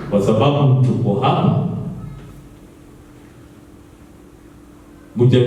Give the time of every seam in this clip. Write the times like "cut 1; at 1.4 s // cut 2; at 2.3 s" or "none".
none